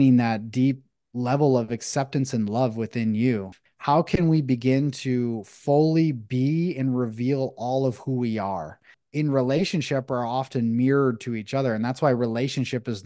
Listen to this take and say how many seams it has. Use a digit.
2